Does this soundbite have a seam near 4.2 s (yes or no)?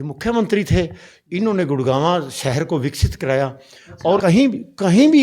yes